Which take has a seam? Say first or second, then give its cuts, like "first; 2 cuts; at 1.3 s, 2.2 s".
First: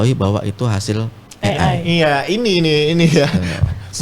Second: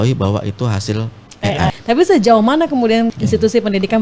second; 2 cuts; at 1.8 s, 3.2 s